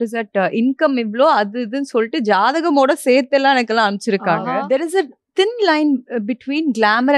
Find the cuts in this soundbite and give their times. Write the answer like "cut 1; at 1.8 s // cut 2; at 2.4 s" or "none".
cut 1; at 4.6 s